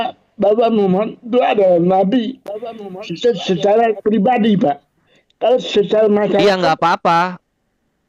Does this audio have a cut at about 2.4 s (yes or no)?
no